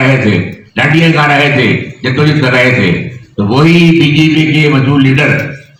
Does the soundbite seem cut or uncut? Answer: uncut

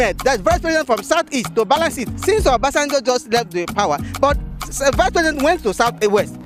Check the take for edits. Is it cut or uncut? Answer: uncut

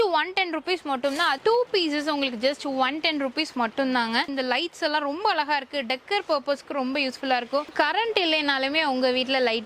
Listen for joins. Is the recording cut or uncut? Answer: cut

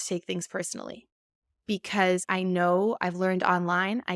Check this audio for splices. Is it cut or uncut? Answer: cut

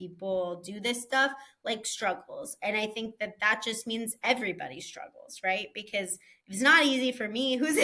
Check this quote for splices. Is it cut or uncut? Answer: uncut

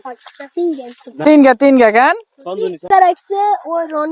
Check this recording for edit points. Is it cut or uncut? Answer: cut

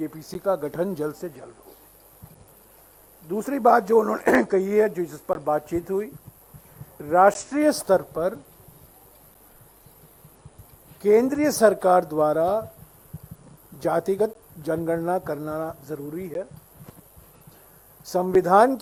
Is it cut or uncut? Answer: uncut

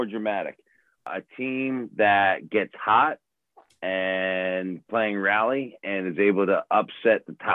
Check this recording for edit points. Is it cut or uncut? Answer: cut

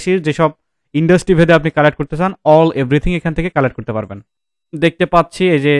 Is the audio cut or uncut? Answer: cut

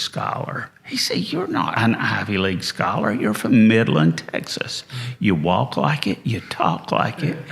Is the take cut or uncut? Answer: cut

